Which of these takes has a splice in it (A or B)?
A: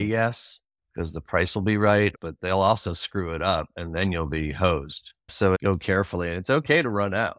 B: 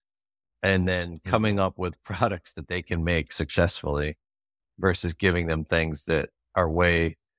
A